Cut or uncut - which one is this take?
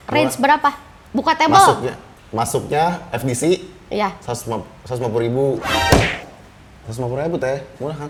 uncut